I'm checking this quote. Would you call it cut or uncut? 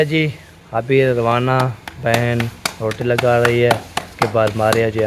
uncut